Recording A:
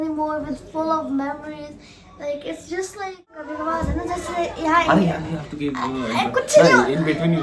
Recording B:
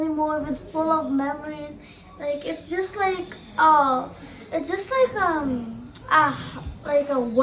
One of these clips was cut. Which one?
A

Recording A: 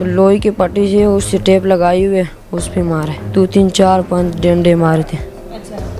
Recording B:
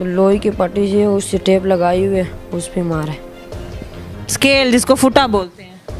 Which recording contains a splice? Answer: A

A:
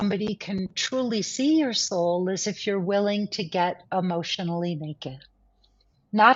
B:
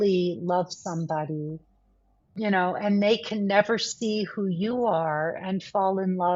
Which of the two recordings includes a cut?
B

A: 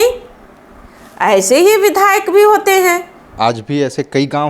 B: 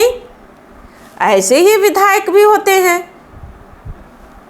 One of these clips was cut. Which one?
A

